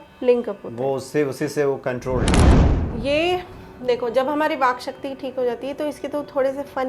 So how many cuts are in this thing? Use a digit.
1